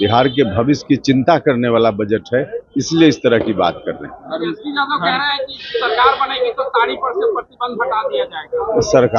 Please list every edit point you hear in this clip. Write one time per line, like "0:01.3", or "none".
none